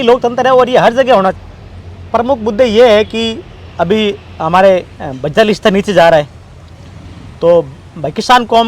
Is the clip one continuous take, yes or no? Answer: no